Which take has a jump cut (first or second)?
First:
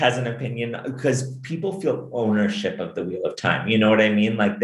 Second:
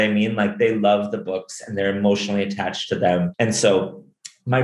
second